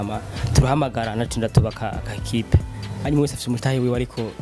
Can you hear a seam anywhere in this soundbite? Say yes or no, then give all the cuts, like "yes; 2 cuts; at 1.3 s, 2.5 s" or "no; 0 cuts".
yes; 1 cut; at 3.0 s